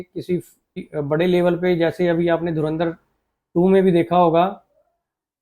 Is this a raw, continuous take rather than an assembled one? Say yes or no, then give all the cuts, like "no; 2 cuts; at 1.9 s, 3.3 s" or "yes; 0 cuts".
no; 1 cut; at 0.9 s